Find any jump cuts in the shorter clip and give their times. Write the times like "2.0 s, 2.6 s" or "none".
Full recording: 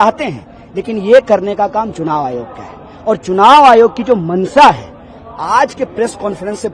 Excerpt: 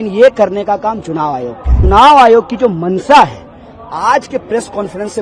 1.8 s